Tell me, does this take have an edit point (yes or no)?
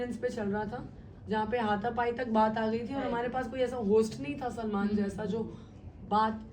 no